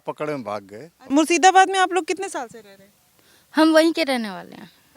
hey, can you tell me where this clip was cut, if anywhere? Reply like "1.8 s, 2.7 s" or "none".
1.1 s